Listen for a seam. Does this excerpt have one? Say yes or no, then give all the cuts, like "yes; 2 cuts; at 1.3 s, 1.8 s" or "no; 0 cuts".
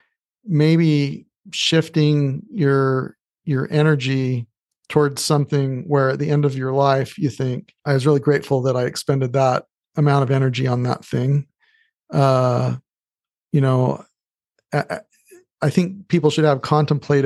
yes; 1 cut; at 7.7 s